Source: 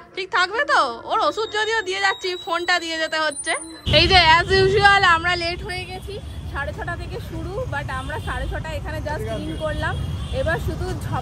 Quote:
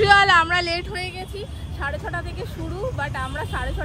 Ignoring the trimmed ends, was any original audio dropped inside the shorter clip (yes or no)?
no